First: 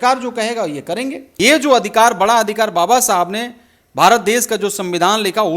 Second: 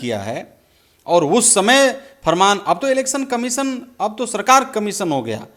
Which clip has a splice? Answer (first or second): first